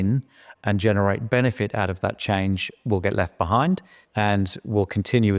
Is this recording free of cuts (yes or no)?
no